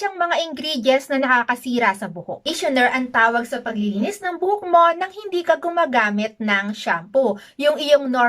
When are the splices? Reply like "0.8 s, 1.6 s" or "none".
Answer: 2.5 s